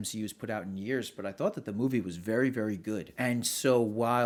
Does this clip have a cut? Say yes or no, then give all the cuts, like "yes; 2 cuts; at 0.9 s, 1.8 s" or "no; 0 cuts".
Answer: no; 0 cuts